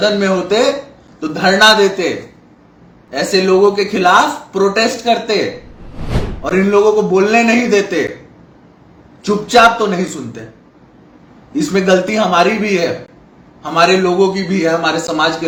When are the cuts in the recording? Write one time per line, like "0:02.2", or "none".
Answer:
none